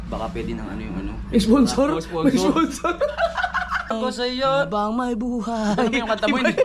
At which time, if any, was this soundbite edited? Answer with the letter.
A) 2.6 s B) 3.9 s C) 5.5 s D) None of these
B